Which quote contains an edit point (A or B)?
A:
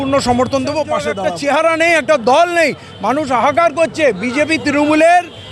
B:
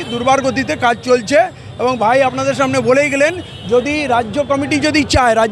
A